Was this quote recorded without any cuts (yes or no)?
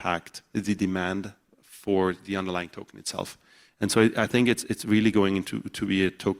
yes